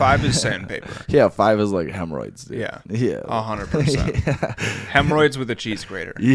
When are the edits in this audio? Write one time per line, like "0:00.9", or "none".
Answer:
none